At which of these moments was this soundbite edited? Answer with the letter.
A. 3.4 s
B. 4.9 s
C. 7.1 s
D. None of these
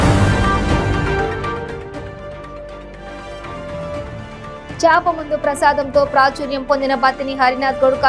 D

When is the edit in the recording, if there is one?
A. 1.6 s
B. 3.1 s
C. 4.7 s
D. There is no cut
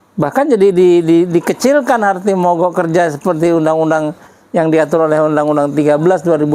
D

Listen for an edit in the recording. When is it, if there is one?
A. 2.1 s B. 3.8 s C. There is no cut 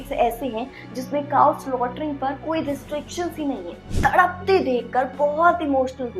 B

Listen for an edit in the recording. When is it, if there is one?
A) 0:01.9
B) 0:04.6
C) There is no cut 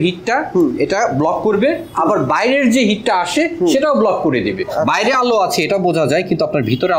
B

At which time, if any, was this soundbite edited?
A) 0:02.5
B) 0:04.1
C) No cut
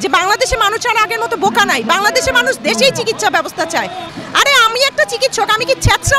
B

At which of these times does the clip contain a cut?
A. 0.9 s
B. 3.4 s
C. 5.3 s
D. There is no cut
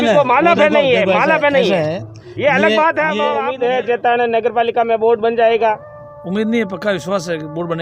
B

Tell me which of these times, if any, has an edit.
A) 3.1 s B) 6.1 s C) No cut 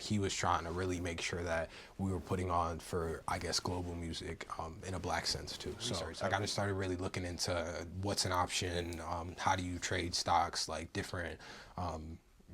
B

